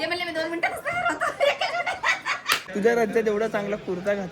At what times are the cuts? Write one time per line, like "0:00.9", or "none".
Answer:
0:02.7